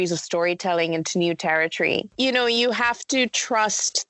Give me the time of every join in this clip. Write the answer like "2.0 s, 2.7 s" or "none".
2.1 s